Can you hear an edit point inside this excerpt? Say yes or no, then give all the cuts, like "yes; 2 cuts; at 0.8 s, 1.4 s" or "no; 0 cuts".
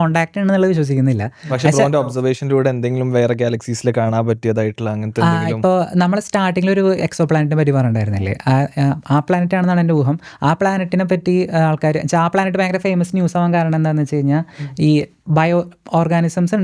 no; 0 cuts